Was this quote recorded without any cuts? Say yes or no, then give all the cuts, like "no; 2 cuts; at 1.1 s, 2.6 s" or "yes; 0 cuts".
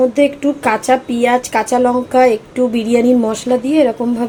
yes; 0 cuts